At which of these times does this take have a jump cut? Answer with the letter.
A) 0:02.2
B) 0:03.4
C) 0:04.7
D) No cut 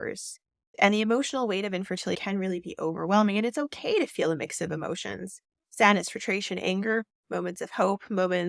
A